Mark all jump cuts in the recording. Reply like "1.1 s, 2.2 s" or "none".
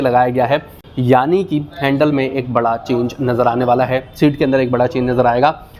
none